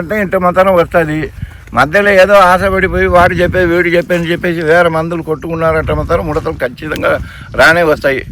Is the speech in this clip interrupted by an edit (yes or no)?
no